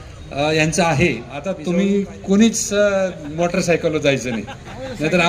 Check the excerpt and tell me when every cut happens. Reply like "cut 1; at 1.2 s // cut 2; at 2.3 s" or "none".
cut 1; at 1.6 s

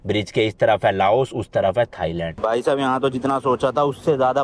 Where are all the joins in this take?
cut 1; at 2.3 s

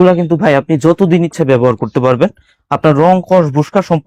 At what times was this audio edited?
none

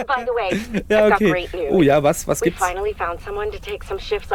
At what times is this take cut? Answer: none

